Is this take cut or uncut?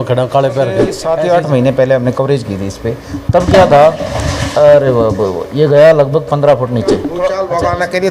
cut